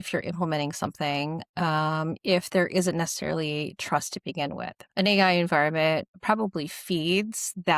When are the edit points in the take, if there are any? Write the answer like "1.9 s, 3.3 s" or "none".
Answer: 4.7 s, 6.1 s